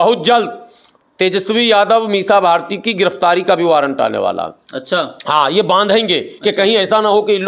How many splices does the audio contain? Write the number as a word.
zero